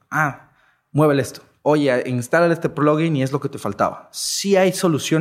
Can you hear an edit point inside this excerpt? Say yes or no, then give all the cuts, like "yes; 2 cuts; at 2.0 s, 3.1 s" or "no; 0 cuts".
yes; 1 cut; at 1.4 s